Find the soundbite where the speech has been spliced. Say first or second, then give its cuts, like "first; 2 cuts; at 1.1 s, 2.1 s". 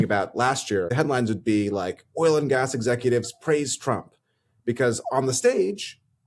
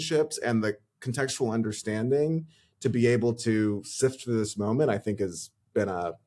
first; 1 cut; at 0.9 s